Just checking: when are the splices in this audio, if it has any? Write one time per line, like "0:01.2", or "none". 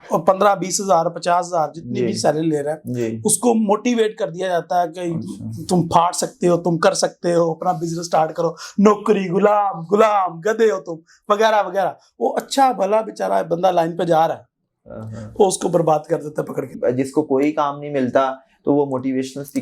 0:16.7